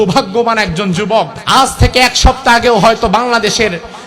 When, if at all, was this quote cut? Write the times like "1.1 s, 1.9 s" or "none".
1.4 s